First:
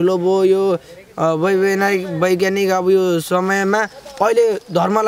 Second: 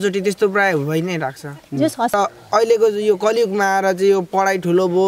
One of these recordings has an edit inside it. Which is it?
second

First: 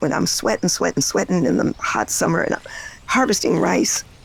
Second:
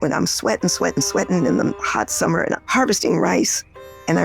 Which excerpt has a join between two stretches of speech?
second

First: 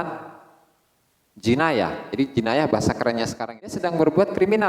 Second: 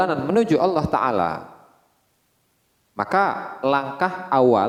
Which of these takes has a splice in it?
first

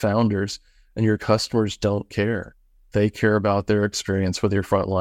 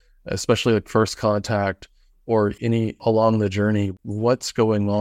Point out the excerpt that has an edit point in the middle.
second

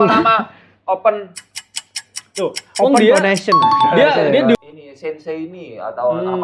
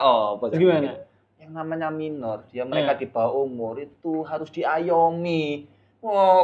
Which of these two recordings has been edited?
first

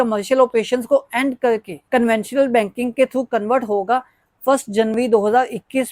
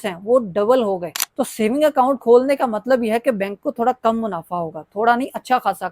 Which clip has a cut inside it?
second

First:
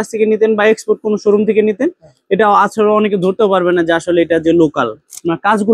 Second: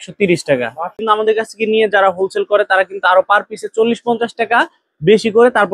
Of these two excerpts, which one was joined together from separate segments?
second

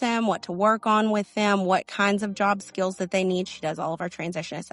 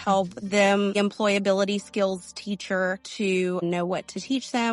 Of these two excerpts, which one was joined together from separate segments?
second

